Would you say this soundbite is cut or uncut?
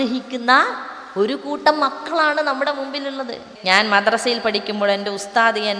cut